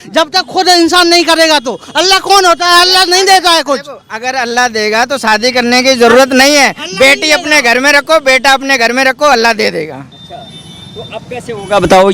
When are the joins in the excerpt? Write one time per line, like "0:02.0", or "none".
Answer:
none